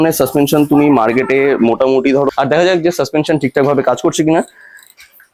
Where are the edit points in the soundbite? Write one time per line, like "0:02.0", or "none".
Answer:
0:02.3